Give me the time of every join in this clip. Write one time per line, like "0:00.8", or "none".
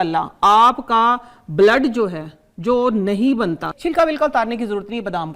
0:03.7